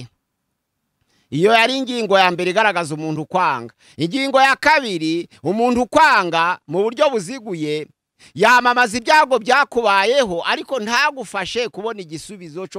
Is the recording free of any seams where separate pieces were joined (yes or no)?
yes